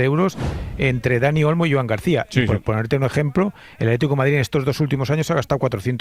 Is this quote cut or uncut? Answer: uncut